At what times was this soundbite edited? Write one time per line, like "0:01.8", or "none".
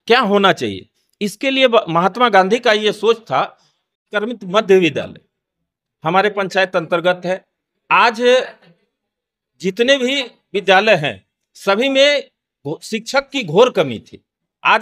0:04.0